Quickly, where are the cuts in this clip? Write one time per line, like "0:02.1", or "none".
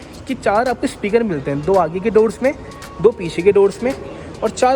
none